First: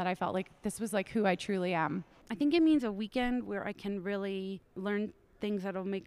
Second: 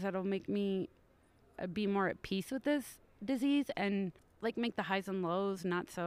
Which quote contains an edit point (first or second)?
first